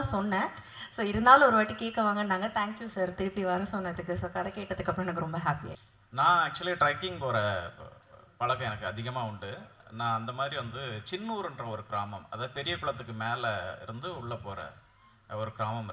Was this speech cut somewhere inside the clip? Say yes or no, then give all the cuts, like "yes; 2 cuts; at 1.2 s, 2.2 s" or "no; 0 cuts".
yes; 1 cut; at 5.7 s